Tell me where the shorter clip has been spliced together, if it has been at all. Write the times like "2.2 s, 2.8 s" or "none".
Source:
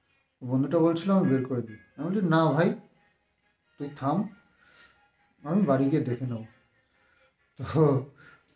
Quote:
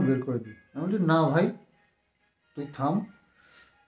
none